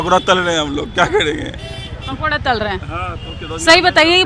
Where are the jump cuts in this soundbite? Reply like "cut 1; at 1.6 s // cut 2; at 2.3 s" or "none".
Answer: none